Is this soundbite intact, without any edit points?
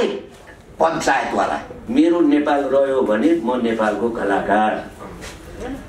no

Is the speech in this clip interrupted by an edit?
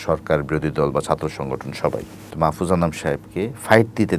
yes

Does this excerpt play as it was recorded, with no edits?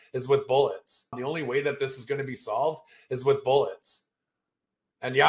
yes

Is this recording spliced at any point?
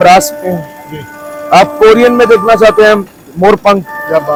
no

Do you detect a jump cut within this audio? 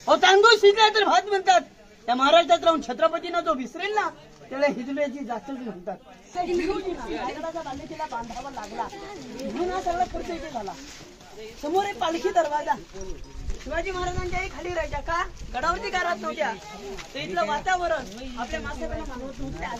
no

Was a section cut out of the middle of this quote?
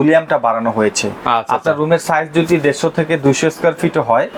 no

